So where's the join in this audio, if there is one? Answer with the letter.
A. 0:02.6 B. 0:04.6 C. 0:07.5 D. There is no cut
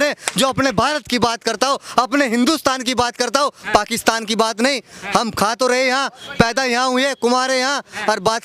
D